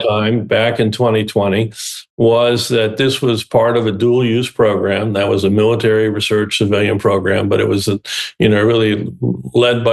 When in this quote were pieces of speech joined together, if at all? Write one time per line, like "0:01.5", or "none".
none